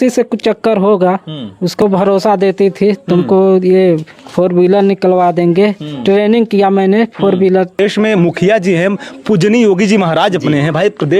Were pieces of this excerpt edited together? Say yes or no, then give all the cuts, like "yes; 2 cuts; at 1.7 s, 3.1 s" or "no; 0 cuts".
yes; 2 cuts; at 1.8 s, 7.8 s